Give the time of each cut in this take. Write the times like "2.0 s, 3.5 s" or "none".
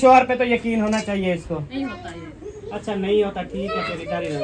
1.7 s